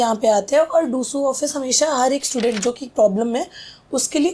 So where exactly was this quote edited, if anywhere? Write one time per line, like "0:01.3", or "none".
none